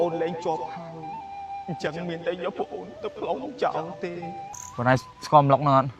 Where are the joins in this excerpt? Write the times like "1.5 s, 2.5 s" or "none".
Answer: 4.5 s